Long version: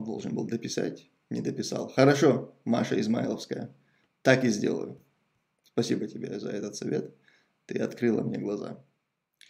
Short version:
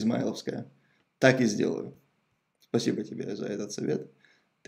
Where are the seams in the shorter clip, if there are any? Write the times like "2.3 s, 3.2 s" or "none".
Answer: none